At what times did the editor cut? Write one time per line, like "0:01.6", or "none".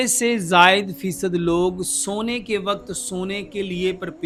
none